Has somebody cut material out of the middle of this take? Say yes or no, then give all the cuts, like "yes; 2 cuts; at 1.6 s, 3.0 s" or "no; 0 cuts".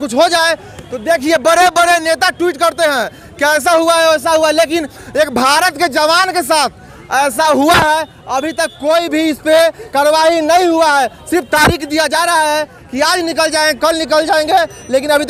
no; 0 cuts